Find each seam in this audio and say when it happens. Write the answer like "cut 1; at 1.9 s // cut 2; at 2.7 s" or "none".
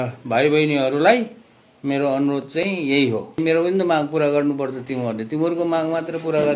cut 1; at 3.4 s